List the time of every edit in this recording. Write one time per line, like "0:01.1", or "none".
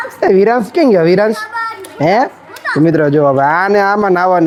none